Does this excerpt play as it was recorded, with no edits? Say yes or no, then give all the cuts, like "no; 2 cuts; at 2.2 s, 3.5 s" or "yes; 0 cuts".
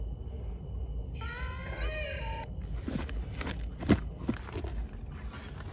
no; 1 cut; at 4.5 s